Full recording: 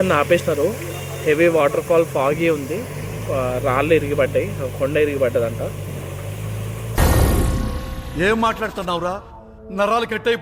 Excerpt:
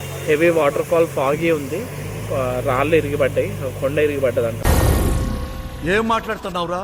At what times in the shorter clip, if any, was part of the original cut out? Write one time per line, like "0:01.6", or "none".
0:04.6